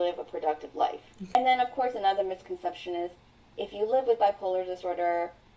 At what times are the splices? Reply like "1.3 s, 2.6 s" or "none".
1.3 s